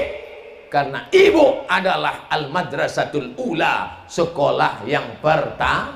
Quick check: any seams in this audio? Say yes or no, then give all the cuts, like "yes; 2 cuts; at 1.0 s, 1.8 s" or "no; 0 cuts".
no; 0 cuts